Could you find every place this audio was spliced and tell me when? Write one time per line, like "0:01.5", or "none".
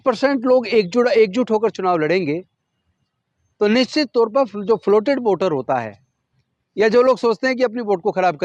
none